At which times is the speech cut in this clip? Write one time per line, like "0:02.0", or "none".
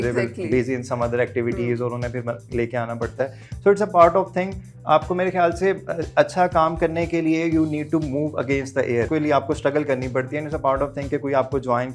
0:09.1